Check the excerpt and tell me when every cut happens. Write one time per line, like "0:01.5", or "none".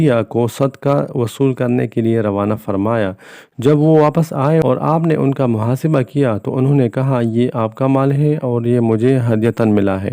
0:04.6